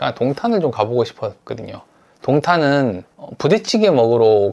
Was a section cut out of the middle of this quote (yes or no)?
no